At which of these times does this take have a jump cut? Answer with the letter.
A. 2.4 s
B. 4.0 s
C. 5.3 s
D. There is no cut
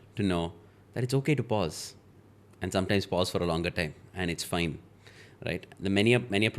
D